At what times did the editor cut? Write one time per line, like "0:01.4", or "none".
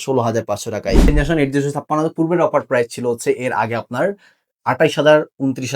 0:01.1